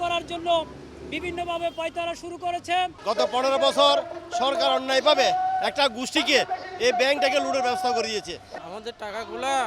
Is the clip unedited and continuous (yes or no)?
no